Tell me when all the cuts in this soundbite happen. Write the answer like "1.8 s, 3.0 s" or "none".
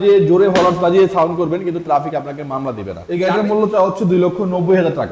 3.0 s